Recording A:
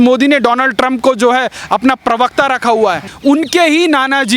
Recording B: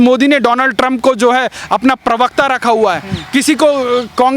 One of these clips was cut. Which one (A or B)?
A